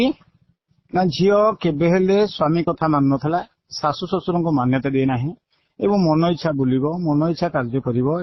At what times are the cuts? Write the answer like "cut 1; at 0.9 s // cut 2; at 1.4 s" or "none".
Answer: none